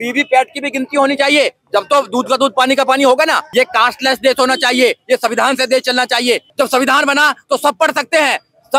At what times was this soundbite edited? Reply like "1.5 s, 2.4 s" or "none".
3.4 s, 6.5 s